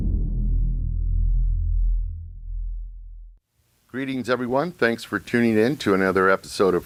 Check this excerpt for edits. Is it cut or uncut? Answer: uncut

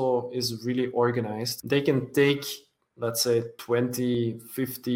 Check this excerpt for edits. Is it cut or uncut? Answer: cut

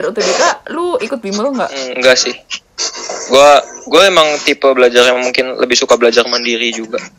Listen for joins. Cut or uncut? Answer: cut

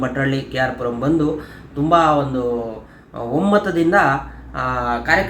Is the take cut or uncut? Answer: uncut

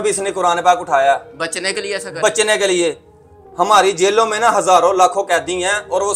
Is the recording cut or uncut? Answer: uncut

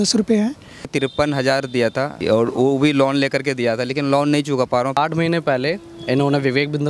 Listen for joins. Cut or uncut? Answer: cut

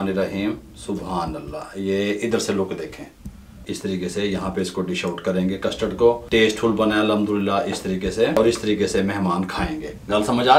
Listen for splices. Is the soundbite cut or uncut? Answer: cut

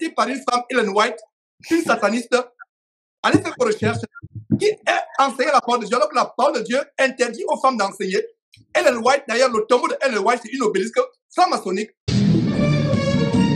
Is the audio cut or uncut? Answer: cut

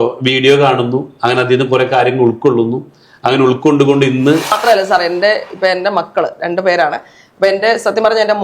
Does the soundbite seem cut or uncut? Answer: cut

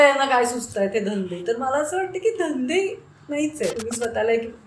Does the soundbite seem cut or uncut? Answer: cut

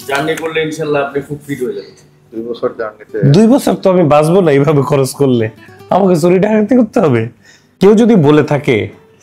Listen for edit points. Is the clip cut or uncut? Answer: cut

